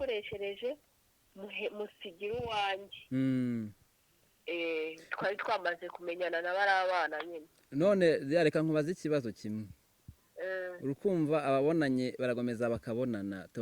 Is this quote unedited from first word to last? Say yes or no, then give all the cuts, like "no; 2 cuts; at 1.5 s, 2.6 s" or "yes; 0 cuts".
yes; 0 cuts